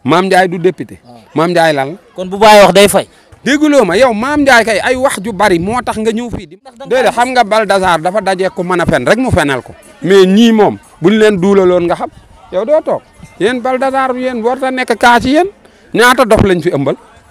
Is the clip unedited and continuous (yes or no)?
no